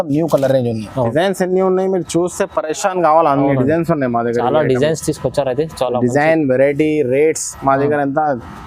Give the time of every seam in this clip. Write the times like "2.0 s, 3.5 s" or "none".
1.1 s